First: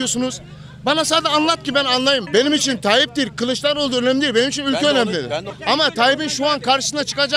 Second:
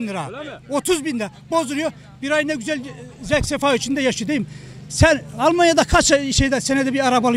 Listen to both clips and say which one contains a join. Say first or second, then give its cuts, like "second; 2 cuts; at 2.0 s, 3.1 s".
first; 2 cuts; at 2.2 s, 5.5 s